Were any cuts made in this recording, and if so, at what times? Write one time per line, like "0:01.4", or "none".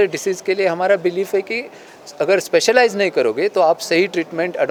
none